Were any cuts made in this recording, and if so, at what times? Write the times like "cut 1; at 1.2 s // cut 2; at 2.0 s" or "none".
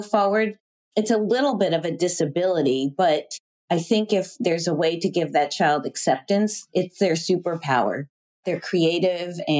cut 1; at 8.4 s